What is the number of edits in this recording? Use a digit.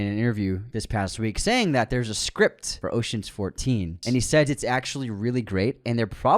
2